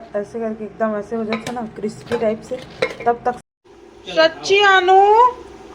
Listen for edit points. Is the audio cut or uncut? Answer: cut